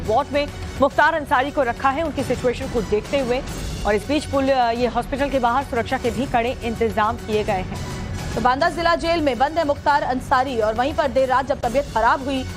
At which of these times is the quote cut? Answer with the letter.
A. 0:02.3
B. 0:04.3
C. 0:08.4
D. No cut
D